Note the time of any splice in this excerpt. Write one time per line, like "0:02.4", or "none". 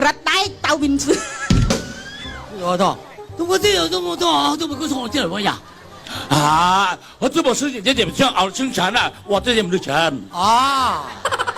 0:03.2